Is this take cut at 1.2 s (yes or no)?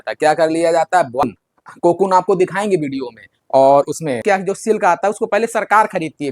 yes